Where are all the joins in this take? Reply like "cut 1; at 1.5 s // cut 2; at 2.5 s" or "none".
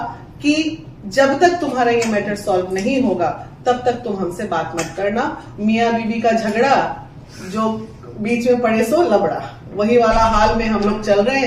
cut 1; at 5.4 s